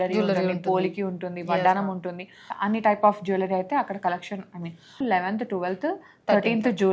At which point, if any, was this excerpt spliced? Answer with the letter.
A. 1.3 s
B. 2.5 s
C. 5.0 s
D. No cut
C